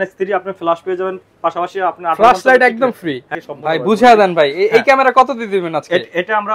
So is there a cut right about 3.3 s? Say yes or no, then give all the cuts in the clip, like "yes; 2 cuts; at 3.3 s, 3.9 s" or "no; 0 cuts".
yes; 1 cut; at 3.3 s